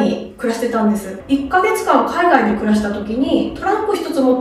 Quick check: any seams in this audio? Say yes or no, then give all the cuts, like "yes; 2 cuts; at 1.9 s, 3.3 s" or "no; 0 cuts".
yes; 1 cut; at 1.1 s